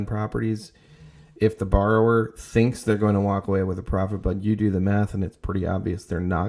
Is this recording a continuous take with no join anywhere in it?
yes; 0 cuts

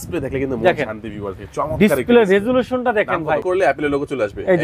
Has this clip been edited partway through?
yes; 1 cut; at 3.4 s

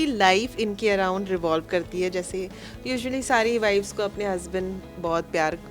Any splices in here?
no; 0 cuts

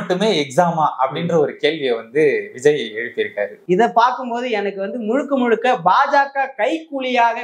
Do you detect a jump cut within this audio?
yes; 1 cut; at 3.5 s

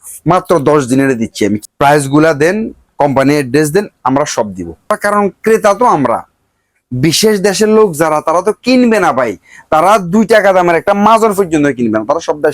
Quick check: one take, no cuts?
no; 2 cuts; at 1.6 s, 4.9 s

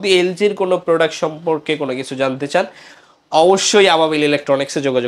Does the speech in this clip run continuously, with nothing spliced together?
yes; 0 cuts

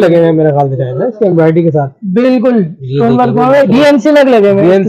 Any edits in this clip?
no; 0 cuts

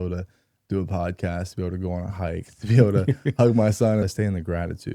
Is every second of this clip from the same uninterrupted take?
no; 1 cut; at 4.0 s

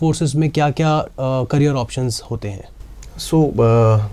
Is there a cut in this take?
no; 0 cuts

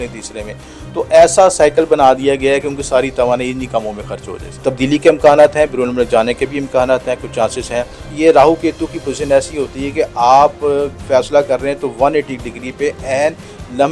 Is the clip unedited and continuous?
no; 2 cuts; at 4.5 s, 8.1 s

